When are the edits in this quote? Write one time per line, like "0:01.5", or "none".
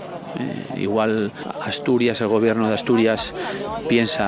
none